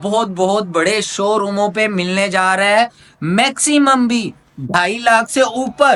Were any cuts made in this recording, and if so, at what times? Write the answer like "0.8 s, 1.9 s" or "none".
none